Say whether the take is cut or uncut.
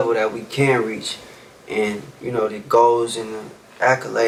uncut